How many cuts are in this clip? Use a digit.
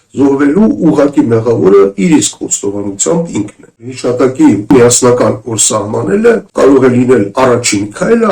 3